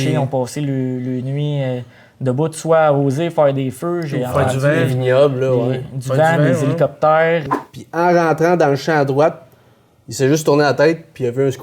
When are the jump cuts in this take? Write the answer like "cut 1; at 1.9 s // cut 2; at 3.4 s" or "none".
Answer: cut 1; at 7.4 s

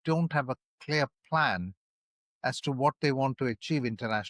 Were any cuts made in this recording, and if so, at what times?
none

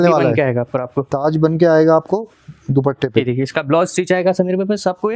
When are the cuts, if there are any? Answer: cut 1; at 3.2 s

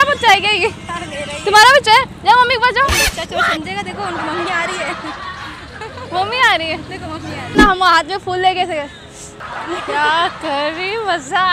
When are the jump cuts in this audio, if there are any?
cut 1; at 7.5 s

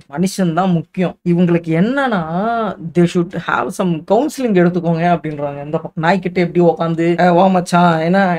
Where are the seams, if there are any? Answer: cut 1; at 1.2 s

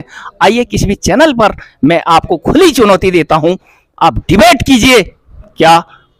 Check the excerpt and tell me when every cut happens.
none

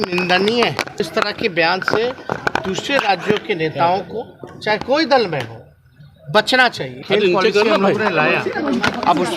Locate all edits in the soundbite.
cut 1; at 1.0 s // cut 2; at 7.0 s

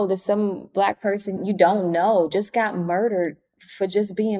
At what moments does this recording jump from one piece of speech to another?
cut 1; at 1.4 s

